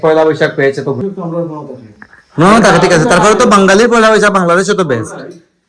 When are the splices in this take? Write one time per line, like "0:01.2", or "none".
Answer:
0:01.0